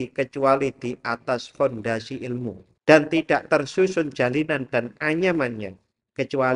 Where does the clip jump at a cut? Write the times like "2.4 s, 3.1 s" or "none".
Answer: 2.7 s